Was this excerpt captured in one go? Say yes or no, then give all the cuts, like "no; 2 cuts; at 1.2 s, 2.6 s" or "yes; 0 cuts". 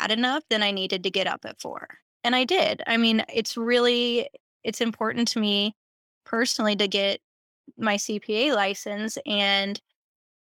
yes; 0 cuts